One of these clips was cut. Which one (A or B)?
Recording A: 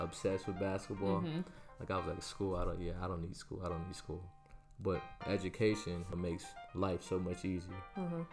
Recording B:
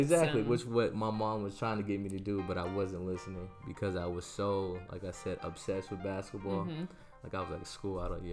A